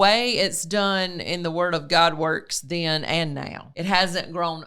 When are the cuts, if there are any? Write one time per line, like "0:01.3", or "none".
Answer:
0:03.6